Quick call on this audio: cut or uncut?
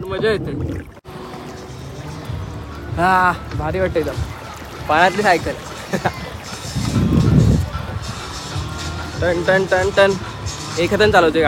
cut